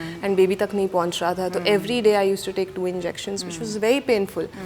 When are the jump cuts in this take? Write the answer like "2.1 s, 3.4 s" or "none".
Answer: none